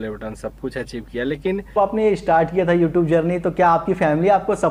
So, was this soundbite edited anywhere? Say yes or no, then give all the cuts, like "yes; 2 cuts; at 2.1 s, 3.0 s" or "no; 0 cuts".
yes; 1 cut; at 1.8 s